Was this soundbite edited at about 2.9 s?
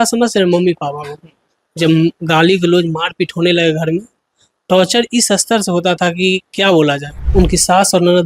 no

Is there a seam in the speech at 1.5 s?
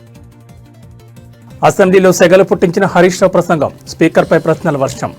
yes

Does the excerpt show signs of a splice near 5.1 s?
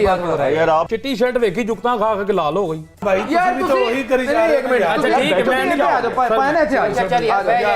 no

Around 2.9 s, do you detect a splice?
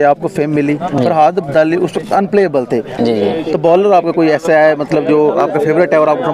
yes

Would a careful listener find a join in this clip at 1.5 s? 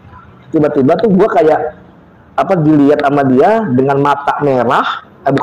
no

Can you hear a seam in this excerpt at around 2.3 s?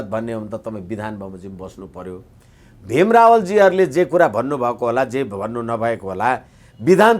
no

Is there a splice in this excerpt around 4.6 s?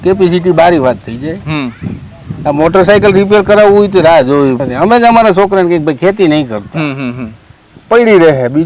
yes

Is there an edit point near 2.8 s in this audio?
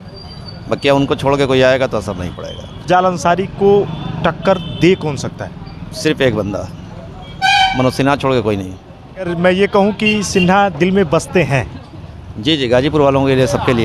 yes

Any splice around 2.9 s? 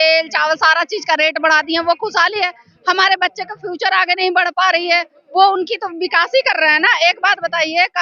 no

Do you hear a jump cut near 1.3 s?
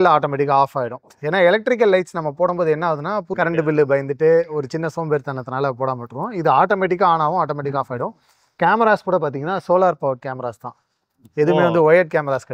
no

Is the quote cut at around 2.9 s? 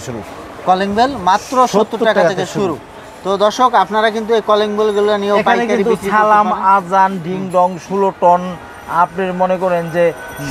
no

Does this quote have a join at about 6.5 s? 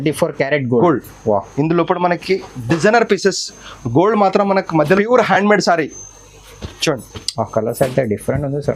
no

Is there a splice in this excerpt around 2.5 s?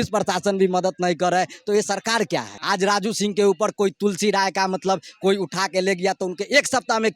yes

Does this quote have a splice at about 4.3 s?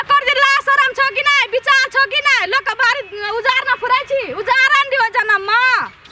no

